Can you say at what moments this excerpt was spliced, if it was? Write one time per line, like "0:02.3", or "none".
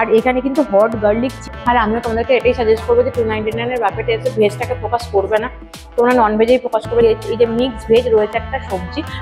0:01.5
0:07.0